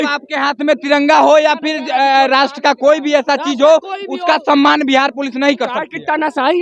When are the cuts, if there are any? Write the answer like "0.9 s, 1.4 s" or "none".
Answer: none

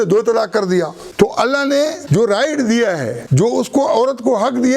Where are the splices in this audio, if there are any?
1.0 s, 2.0 s, 3.2 s

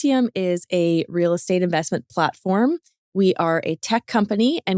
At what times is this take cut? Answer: none

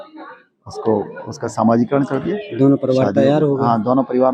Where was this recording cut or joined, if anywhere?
none

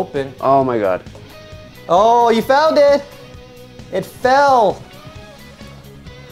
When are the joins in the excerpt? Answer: none

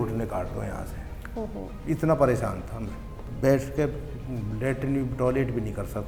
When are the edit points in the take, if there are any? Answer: 3.2 s

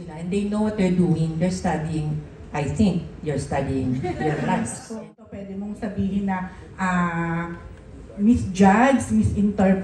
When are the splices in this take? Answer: 4.9 s

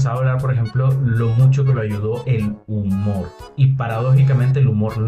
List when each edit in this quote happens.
none

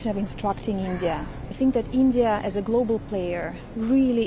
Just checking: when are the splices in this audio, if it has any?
1.5 s

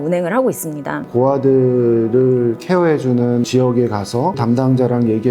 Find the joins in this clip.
1.0 s, 3.5 s, 4.4 s

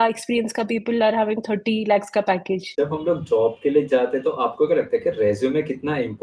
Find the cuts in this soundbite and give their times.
2.7 s

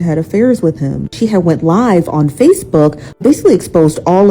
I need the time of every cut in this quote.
1.1 s, 3.1 s

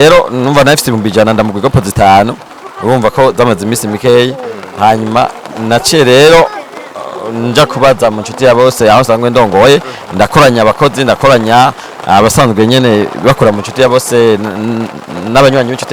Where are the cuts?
none

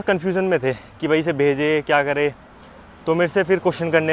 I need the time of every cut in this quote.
none

